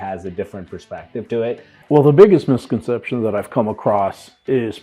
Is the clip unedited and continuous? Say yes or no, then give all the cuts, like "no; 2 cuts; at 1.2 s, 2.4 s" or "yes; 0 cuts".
no; 1 cut; at 1.7 s